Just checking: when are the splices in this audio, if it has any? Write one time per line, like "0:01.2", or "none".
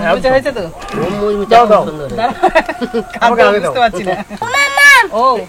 0:04.4